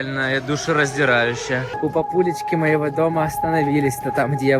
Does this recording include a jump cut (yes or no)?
yes